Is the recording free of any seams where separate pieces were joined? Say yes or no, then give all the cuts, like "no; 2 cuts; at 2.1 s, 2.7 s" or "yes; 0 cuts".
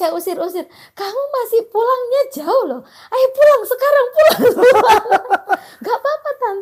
yes; 0 cuts